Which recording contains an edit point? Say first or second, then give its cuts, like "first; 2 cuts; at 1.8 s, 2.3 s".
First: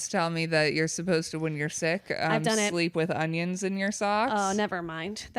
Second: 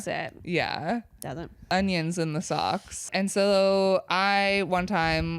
second; 2 cuts; at 1.7 s, 3.1 s